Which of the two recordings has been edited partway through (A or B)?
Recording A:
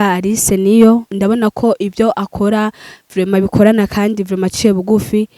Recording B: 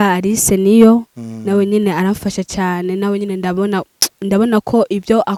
A